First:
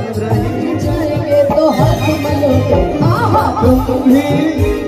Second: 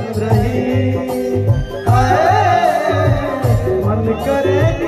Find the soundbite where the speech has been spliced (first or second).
first